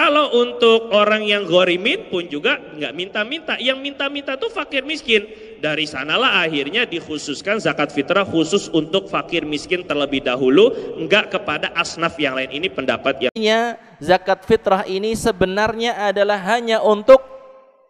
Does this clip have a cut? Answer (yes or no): yes